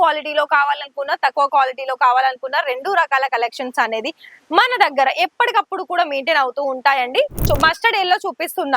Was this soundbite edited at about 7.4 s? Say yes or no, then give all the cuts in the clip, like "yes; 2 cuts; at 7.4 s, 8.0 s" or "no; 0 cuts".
yes; 1 cut; at 7.4 s